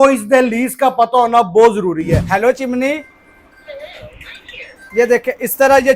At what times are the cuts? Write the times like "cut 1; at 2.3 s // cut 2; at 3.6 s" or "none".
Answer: cut 1; at 2.2 s